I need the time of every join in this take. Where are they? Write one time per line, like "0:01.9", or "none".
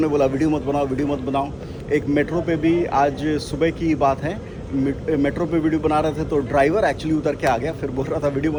none